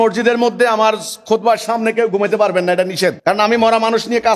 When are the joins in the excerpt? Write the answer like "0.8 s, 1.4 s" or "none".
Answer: 3.2 s